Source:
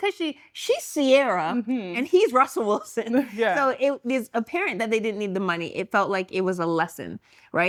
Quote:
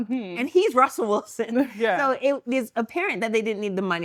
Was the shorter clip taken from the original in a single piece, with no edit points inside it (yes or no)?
yes